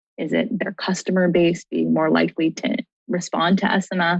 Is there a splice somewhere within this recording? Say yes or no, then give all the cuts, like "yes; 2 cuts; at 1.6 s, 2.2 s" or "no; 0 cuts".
yes; 1 cut; at 2.9 s